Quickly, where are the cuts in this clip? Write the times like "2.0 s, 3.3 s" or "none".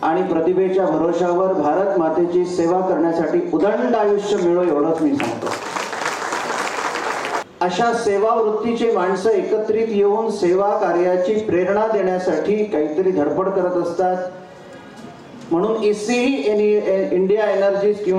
7.4 s